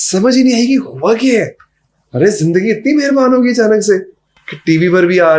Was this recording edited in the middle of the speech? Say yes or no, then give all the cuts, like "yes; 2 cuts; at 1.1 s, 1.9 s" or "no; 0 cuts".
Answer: no; 0 cuts